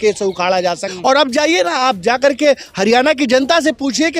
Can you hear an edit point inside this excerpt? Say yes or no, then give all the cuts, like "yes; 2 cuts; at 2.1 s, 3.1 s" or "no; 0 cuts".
yes; 1 cut; at 0.9 s